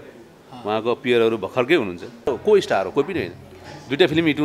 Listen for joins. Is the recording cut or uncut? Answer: cut